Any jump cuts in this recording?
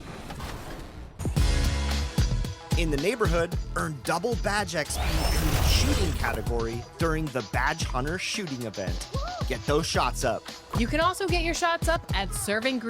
yes; 1 cut; at 1.1 s

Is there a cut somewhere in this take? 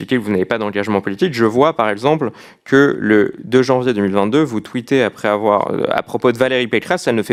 no; 0 cuts

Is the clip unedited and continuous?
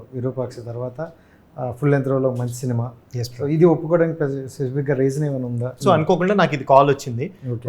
no; 1 cut; at 5.8 s

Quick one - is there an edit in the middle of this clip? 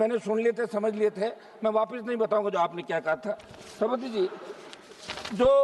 no; 0 cuts

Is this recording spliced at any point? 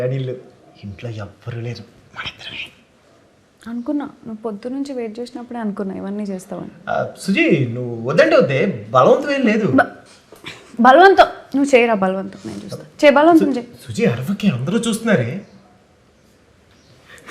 no; 0 cuts

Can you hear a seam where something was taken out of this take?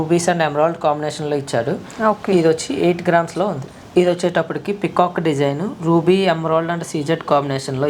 no; 0 cuts

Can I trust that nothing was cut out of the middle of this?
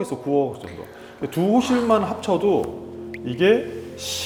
yes; 0 cuts

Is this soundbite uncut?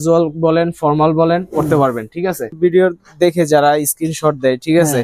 no; 1 cut; at 2.5 s

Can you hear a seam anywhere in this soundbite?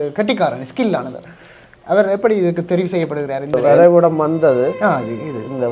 yes; 1 cut; at 3.5 s

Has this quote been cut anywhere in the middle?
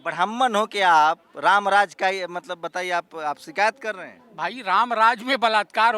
no; 0 cuts

